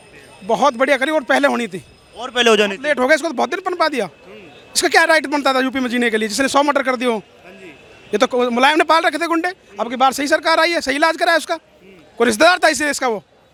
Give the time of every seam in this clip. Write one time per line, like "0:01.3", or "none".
none